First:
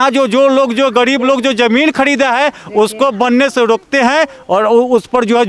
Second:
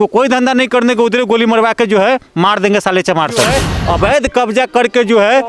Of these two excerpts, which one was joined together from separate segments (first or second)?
second